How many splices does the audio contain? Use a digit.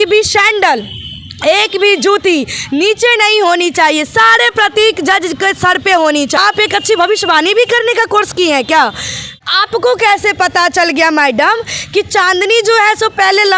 2